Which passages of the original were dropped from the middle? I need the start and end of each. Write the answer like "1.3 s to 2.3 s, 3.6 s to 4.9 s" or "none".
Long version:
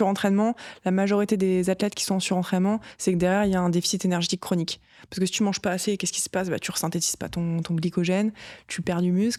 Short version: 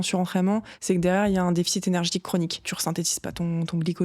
4.9 s to 6.7 s

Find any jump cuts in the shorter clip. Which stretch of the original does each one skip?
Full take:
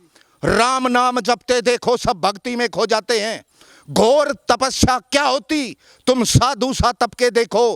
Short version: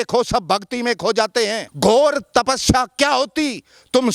3.4 s to 3.8 s

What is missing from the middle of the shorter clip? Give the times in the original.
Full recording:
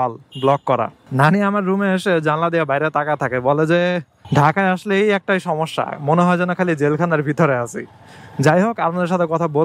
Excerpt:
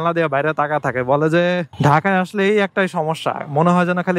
4.1 s to 4.2 s

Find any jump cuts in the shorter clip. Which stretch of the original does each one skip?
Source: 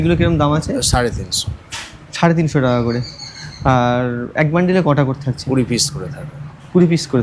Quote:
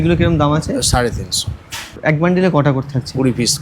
1.9 s to 4.3 s

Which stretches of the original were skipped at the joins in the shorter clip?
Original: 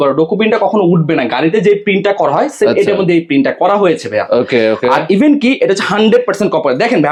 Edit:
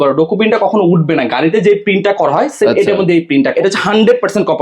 3.5 s to 5.6 s

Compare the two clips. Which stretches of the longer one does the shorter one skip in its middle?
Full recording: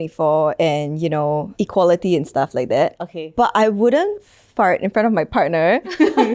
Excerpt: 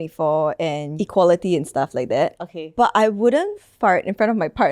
0.9 s to 1.5 s, 4.2 s to 4.4 s

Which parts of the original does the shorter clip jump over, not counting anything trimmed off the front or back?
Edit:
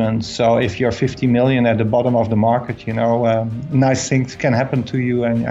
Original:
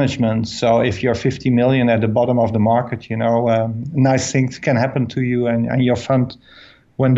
none

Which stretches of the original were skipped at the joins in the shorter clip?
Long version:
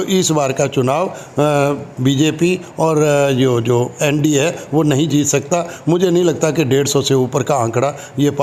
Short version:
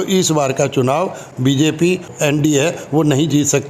1.2 s to 1.8 s, 2.7 s to 3.9 s

